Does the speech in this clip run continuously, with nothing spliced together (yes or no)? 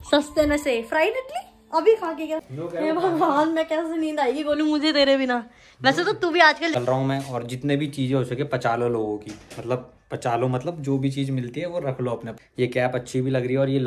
no